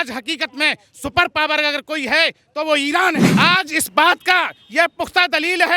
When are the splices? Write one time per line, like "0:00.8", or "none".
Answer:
0:03.3